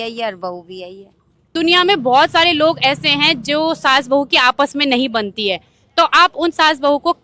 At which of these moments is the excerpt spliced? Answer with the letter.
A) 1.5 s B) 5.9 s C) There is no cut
A